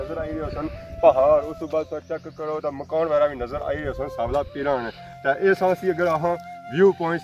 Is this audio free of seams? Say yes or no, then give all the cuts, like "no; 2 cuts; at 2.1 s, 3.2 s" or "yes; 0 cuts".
yes; 0 cuts